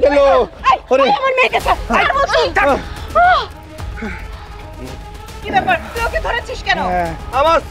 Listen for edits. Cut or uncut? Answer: uncut